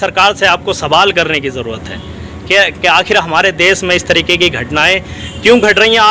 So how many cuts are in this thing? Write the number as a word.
zero